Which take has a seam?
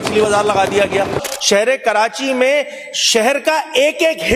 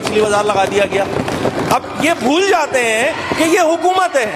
first; 1 cut; at 1.2 s

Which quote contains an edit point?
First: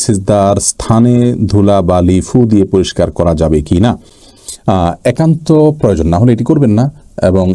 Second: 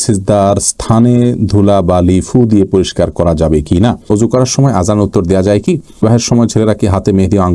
second; 2 cuts; at 4.1 s, 6.0 s

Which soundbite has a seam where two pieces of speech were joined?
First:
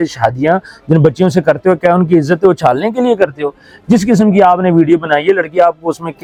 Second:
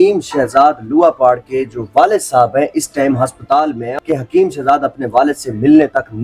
second; 1 cut; at 3.8 s

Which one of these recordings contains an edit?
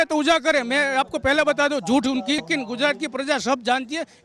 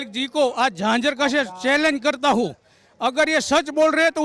first; 1 cut; at 2.5 s

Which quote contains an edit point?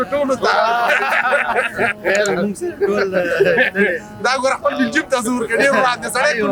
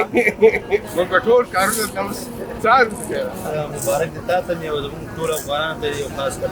second; 1 cut; at 3.4 s

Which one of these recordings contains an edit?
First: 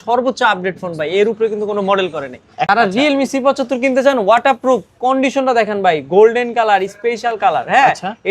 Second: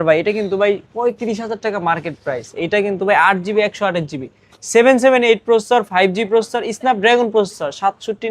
first; 1 cut; at 2.7 s

